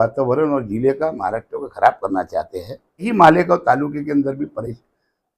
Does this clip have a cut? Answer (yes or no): yes